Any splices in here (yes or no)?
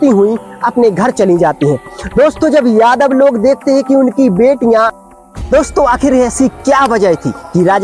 yes